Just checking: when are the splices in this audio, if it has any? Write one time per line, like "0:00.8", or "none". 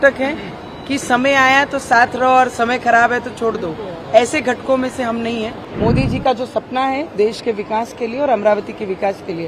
0:05.6